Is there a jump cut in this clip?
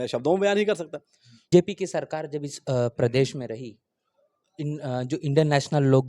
yes; 1 cut; at 1.5 s

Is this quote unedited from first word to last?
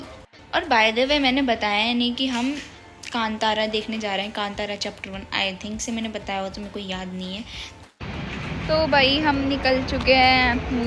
no; 1 cut; at 7.7 s

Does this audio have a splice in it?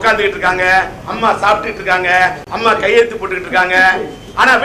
no; 0 cuts

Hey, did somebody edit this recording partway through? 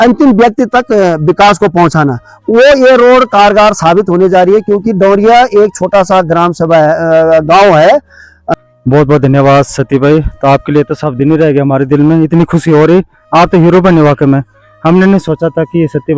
yes; 1 cut; at 8.3 s

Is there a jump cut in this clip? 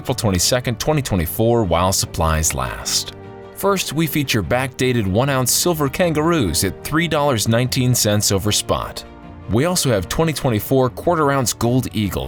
no; 0 cuts

